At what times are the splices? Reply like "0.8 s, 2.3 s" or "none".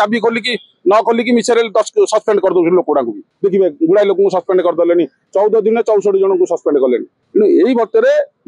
none